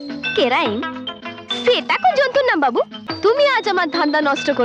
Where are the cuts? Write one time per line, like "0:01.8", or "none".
0:03.0